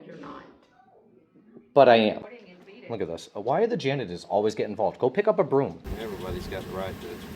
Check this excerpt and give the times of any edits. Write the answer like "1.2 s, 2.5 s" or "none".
2.3 s, 5.8 s

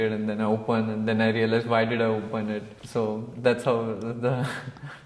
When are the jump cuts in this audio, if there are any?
none

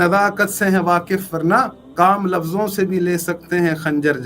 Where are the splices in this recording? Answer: 1.8 s

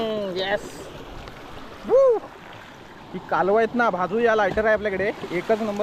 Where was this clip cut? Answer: none

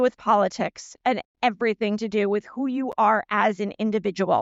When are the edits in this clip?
none

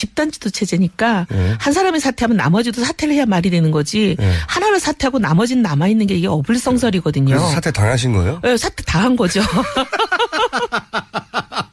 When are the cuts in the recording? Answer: 6.9 s

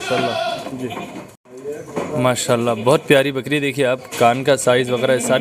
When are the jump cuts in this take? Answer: 1.3 s

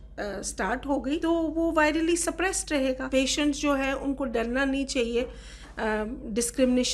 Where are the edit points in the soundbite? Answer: 1.2 s, 3.0 s

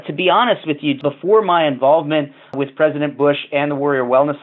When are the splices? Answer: 1.0 s, 2.6 s

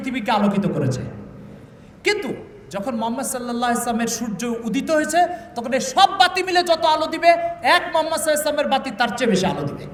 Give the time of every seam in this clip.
none

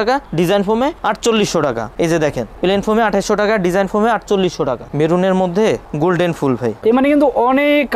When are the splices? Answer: 1.0 s, 1.9 s, 4.9 s, 6.8 s

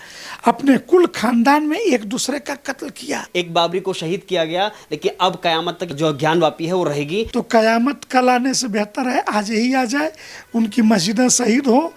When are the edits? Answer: 3.2 s, 5.9 s, 7.3 s

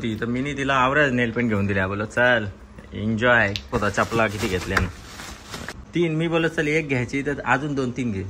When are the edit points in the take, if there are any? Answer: 3.7 s, 5.7 s

